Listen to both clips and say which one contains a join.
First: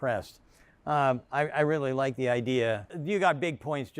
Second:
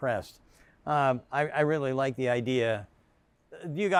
first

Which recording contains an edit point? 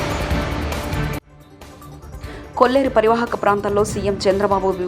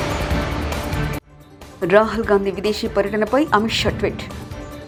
first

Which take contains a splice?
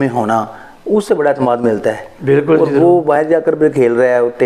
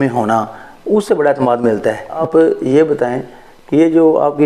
second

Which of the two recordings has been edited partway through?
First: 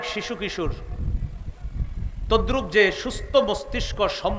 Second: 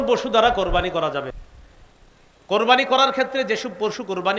second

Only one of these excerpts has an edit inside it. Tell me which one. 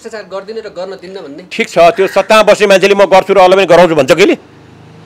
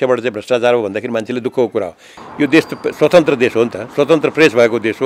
second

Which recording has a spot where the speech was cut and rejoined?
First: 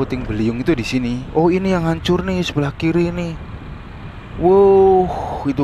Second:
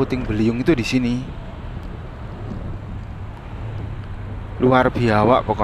first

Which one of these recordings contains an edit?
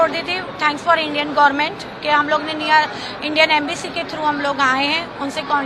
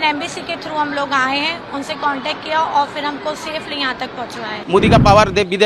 second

